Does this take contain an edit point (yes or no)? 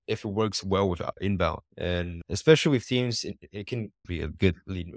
yes